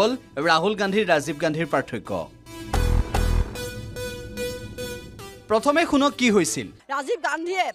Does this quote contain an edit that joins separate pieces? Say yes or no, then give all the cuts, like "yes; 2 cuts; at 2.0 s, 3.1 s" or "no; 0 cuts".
no; 0 cuts